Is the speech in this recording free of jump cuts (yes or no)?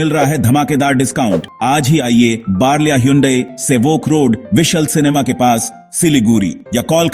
no